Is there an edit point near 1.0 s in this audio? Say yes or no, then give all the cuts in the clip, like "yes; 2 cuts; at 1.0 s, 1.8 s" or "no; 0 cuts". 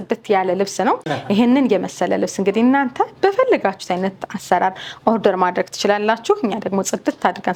no; 0 cuts